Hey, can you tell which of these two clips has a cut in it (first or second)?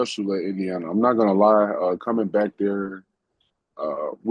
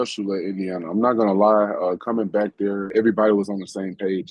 second